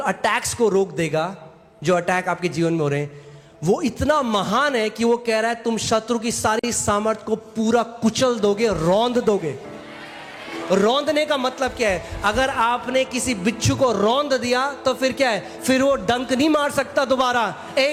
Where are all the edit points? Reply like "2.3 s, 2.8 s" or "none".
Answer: none